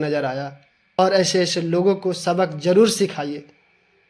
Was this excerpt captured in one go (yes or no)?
no